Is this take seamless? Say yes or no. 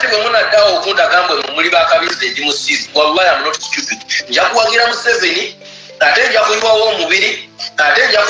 yes